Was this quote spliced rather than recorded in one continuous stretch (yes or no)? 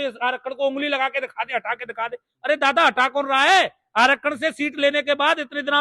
no